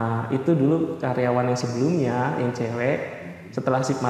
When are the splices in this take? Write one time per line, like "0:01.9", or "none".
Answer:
none